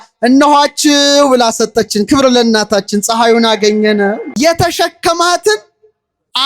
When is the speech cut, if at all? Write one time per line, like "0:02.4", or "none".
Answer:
0:04.3